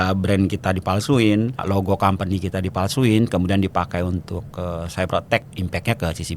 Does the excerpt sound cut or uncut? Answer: cut